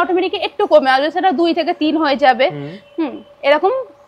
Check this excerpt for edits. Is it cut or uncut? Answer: uncut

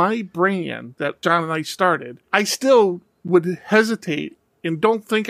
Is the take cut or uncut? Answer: cut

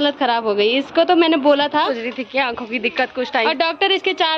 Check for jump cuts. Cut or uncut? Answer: cut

